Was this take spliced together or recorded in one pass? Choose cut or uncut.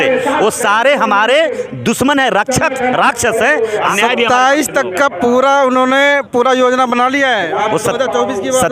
cut